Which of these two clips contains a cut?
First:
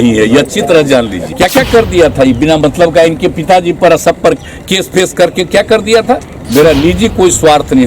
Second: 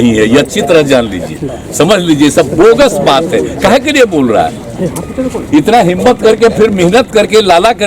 first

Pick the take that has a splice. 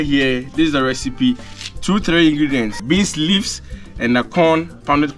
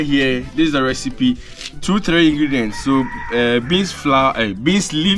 first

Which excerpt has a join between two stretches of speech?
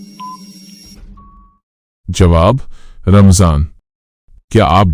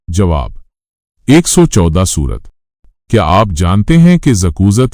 first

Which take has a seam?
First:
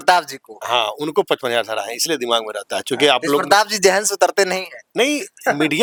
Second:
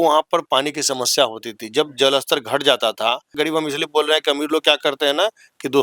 second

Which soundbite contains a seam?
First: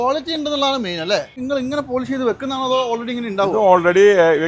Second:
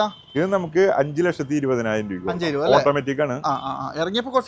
first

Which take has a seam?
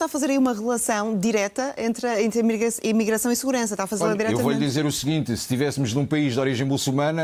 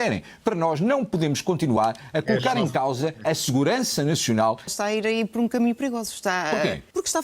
second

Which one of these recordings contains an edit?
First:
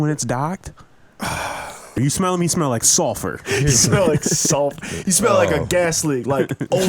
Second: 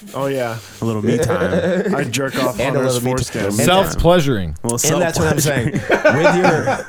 first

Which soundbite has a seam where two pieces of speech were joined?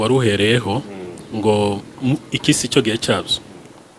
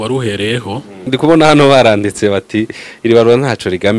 second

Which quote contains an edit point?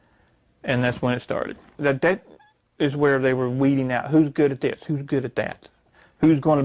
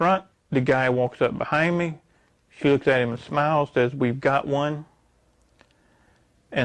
first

